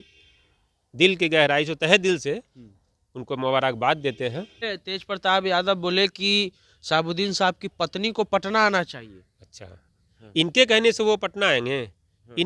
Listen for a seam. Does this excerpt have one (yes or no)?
yes